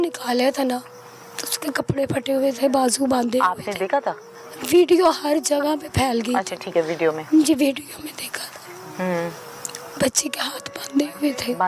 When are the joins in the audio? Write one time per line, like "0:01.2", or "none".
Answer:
none